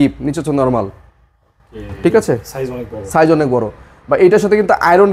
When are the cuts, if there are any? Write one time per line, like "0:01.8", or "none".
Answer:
none

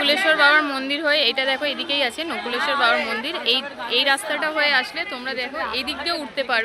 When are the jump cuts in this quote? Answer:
none

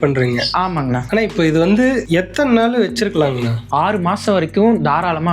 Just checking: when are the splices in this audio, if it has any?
0:01.0
0:02.0
0:03.6

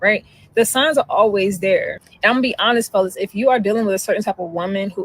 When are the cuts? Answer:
0:04.2

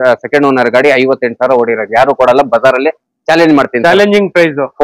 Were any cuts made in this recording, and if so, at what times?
none

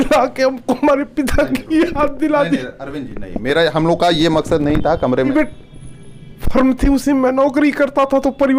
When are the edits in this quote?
0:05.3

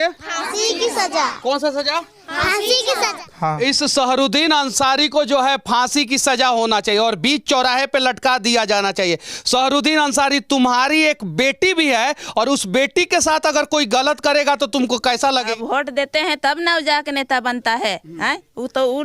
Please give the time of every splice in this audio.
0:03.2
0:15.5

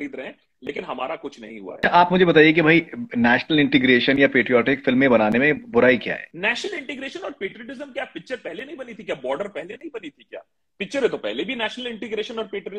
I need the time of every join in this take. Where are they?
0:01.8
0:06.3

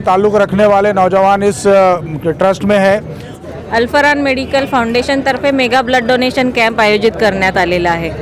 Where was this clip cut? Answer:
0:03.4

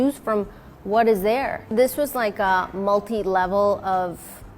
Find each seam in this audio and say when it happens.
0:01.7

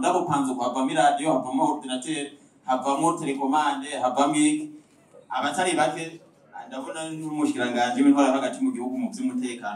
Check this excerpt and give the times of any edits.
none

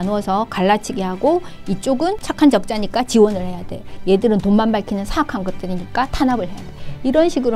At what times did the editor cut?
0:02.3

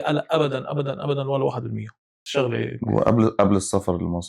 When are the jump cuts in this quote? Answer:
0:02.2

